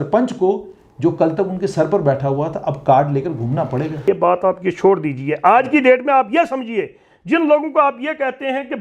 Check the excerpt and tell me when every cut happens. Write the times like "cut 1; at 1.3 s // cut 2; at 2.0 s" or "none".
cut 1; at 4.0 s